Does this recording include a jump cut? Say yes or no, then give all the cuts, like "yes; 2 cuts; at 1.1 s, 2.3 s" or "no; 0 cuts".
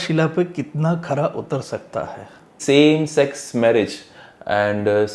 yes; 1 cut; at 2.6 s